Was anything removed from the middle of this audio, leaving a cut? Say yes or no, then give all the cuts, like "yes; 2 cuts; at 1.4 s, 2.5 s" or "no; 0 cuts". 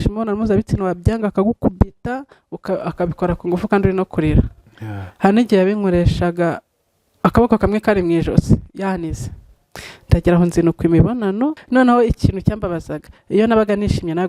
yes; 1 cut; at 11.6 s